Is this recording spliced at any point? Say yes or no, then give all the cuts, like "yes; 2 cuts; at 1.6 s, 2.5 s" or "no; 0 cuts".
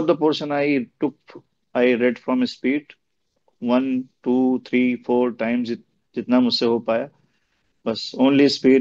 no; 0 cuts